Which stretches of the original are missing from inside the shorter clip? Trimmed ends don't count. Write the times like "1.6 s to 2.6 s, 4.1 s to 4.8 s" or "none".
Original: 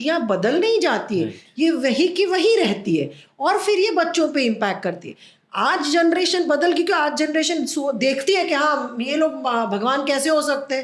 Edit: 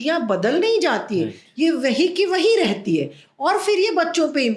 none